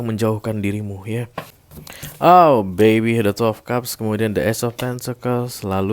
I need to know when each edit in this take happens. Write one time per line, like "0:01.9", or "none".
0:01.6